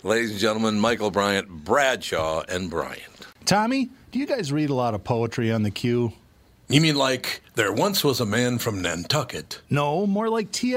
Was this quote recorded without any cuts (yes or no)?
no